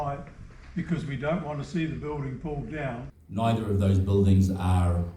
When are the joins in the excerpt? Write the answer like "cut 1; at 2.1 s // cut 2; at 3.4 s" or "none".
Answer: cut 1; at 3.1 s